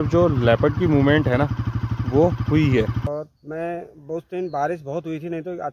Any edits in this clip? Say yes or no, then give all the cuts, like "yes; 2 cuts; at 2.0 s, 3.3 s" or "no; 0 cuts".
yes; 1 cut; at 3.1 s